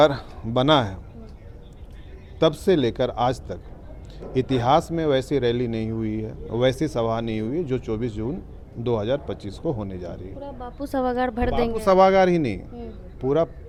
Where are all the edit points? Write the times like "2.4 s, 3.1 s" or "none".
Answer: none